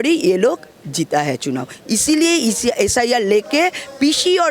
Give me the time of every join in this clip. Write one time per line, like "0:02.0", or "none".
none